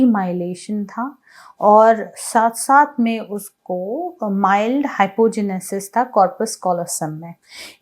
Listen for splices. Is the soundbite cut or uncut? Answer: uncut